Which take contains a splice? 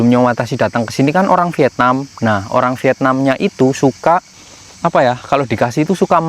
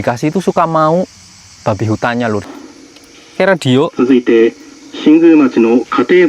second; 1 cut; at 2.5 s

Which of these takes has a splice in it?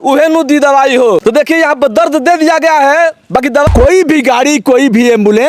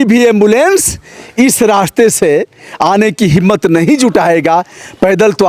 first; 2 cuts; at 1.2 s, 3.7 s

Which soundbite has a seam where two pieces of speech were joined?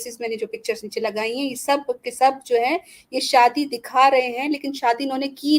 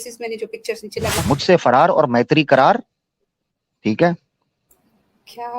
second; 1 cut; at 1.2 s

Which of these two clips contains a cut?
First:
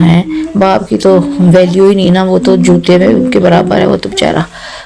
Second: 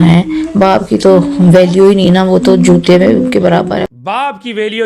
second; 1 cut; at 3.8 s

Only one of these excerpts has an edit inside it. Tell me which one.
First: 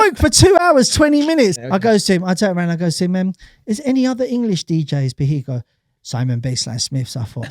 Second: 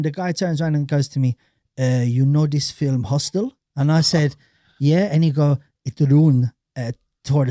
first; 1 cut; at 1.5 s

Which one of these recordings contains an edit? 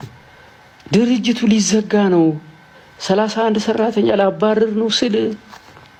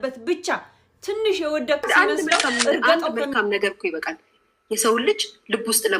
second; 1 cut; at 3.3 s

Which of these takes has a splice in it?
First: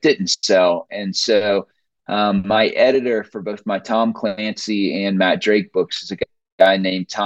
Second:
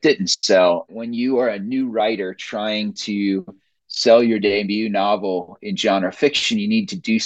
second; 1 cut; at 0.9 s

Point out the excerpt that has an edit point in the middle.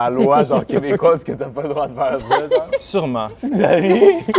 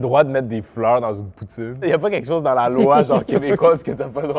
first; 1 cut; at 3.3 s

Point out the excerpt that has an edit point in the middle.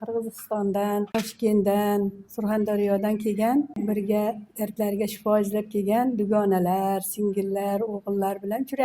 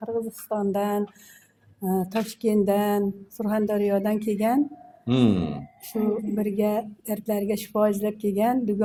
first; 2 cuts; at 1.1 s, 3.8 s

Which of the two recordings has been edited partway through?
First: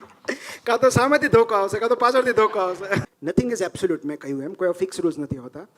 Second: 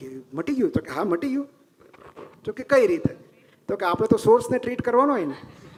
first; 1 cut; at 3.0 s

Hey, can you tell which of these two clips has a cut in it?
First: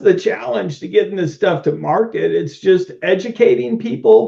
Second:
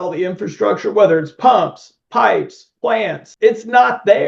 second; 1 cut; at 3.2 s

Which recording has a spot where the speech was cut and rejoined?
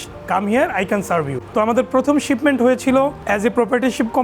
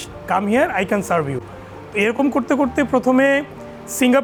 first; 2 cuts; at 1.4 s, 3.2 s

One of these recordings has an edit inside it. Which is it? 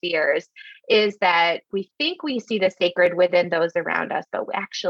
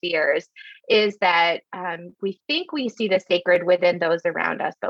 first; 1 cut; at 1.6 s

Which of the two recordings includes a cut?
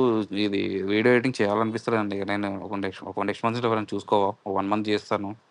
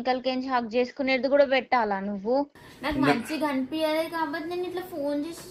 second; 1 cut; at 2.5 s

